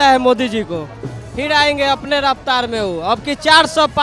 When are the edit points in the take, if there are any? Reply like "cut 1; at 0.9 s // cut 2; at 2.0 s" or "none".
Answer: none